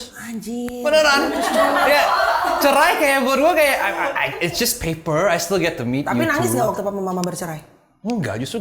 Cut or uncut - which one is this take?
uncut